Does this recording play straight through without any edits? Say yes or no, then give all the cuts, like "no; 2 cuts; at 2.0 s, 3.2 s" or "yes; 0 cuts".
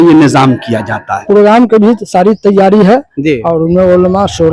no; 1 cut; at 1.1 s